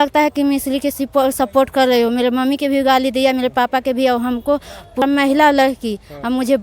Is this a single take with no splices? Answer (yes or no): no